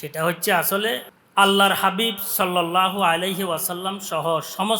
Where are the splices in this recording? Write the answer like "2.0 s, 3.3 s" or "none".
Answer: 1.1 s